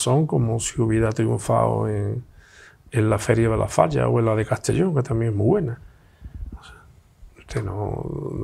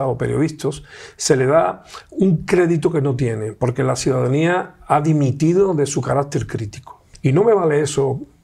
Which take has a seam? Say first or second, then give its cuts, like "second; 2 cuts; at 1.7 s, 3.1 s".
second; 1 cut; at 7.1 s